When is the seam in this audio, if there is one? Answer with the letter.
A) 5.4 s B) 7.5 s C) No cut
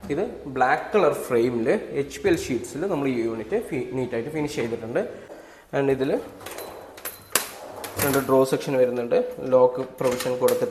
A